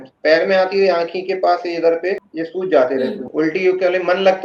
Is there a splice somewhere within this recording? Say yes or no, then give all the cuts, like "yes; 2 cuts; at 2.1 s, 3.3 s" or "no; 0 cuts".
yes; 1 cut; at 3.2 s